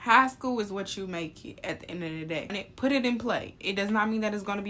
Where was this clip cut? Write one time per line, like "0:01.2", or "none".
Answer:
0:02.5